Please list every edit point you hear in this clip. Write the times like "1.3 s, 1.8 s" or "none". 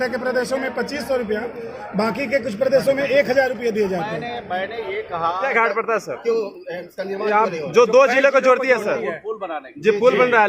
5.5 s

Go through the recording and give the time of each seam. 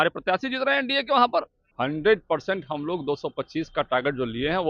1.6 s

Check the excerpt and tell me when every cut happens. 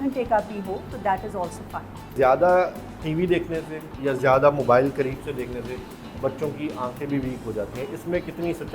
2.1 s

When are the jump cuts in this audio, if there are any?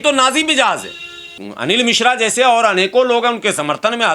1.4 s

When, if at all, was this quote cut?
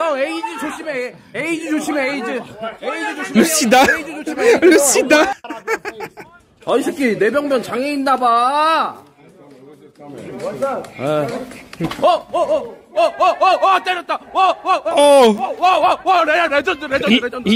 none

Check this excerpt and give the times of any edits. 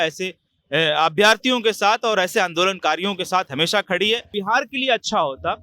4.3 s

